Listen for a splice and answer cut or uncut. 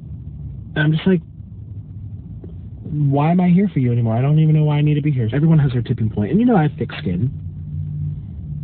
cut